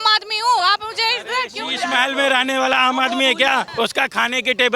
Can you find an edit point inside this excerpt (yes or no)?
yes